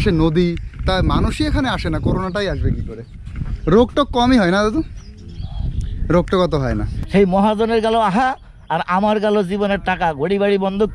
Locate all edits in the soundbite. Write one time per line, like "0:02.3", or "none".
0:06.9